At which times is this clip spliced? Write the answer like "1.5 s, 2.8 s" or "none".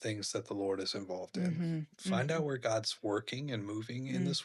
1.9 s

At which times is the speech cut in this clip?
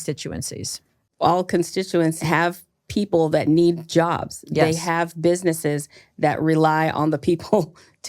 1.0 s, 2.2 s

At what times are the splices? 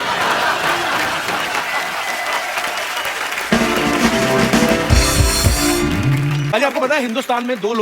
6.5 s

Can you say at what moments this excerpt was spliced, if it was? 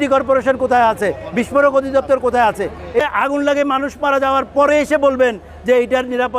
3.0 s

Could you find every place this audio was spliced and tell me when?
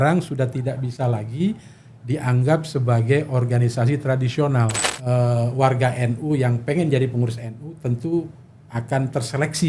4.8 s

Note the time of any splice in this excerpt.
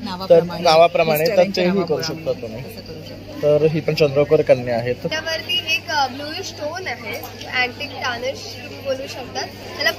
5.1 s

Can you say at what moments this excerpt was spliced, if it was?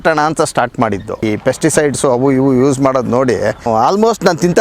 1.2 s, 3.7 s

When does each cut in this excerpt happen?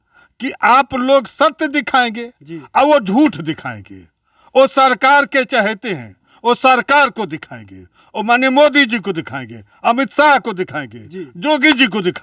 none

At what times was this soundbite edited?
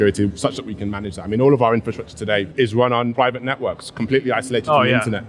2.5 s

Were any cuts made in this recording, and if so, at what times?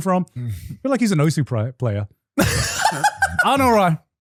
none

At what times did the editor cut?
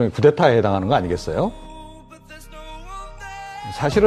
1.6 s

